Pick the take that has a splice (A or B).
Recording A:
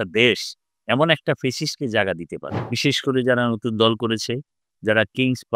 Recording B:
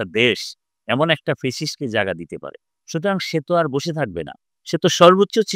A